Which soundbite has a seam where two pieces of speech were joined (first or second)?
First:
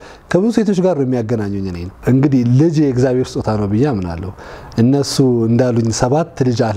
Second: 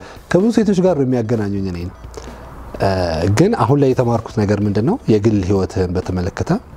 first